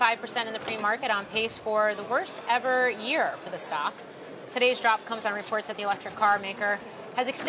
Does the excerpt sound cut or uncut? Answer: uncut